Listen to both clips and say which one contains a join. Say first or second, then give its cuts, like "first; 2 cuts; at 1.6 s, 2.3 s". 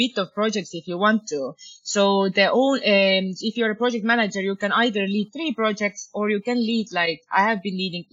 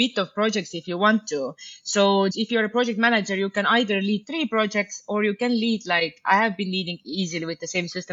second; 1 cut; at 2.3 s